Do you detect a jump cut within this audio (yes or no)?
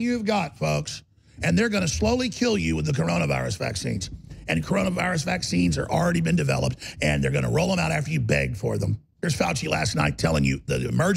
yes